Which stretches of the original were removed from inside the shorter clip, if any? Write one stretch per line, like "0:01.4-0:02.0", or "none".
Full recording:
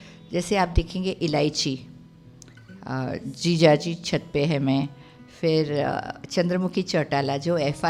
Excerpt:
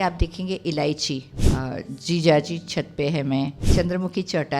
0:01.9-0:02.7
0:05.0-0:06.2